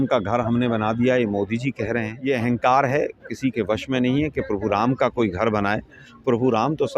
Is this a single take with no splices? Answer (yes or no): no